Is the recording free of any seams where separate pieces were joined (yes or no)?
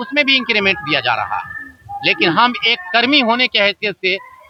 yes